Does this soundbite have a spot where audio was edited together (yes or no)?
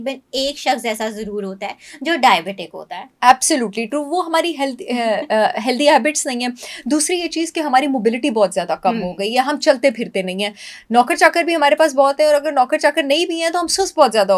no